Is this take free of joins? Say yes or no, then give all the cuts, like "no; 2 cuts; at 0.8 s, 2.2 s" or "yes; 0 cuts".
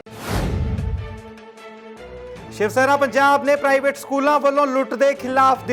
yes; 0 cuts